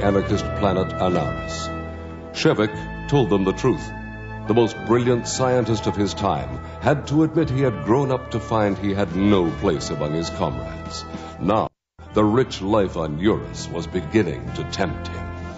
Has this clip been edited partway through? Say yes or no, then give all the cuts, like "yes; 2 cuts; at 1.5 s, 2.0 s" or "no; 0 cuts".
no; 0 cuts